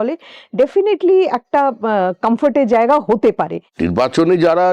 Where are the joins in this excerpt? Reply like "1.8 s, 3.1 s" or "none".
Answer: 3.7 s